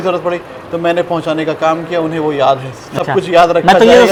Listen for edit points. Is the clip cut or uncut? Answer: uncut